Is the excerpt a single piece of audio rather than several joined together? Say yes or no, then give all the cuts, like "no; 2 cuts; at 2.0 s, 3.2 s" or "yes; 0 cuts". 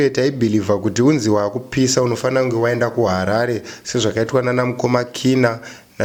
yes; 0 cuts